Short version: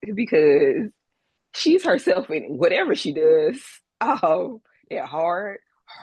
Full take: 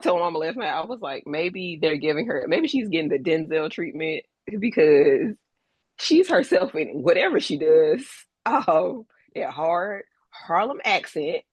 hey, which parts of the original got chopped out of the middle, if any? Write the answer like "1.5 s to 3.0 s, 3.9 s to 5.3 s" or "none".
none